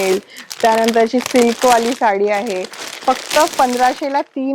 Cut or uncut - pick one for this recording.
uncut